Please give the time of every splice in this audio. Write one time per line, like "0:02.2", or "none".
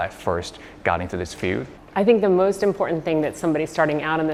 none